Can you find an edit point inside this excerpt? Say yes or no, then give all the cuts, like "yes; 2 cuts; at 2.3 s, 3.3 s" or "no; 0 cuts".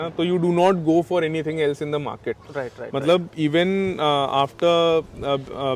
no; 0 cuts